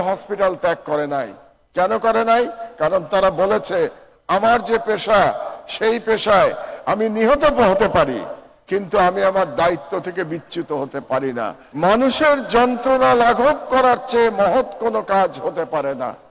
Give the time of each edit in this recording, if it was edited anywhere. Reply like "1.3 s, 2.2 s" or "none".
11.6 s